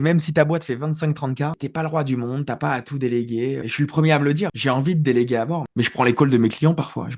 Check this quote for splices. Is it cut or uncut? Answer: uncut